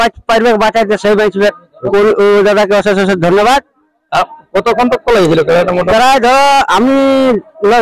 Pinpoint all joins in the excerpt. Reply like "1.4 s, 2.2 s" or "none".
1.8 s